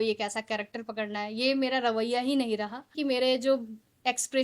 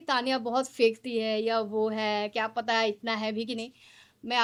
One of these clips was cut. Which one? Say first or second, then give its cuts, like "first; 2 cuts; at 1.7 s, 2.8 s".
first; 1 cut; at 2.9 s